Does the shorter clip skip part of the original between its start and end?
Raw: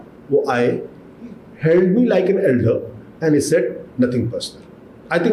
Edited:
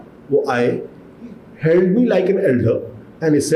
no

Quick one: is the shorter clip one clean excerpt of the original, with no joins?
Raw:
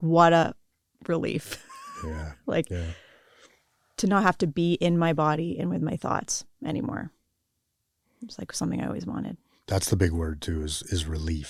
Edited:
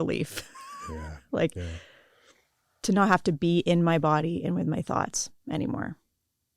yes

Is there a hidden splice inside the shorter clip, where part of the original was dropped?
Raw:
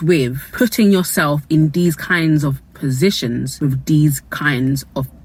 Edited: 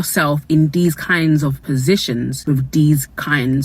yes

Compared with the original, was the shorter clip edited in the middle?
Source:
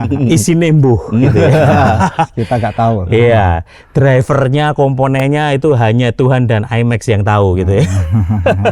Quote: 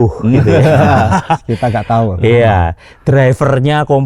no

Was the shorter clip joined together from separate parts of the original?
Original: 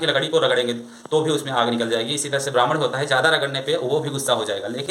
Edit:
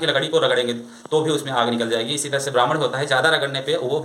no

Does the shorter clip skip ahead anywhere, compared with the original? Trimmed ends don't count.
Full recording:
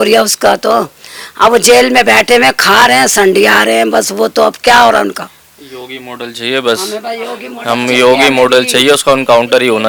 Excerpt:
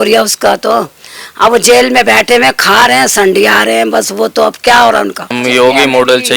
yes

